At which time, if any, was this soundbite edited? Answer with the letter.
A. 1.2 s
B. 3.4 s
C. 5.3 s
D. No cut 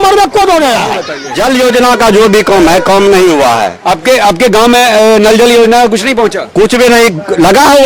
A